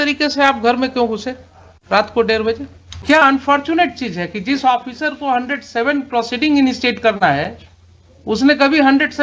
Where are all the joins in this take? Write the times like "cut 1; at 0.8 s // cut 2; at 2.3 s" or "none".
cut 1; at 3.0 s